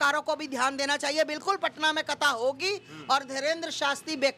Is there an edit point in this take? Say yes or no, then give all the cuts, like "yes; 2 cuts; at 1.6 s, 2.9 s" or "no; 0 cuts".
no; 0 cuts